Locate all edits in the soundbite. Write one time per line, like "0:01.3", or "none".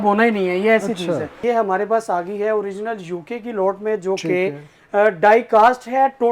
0:01.3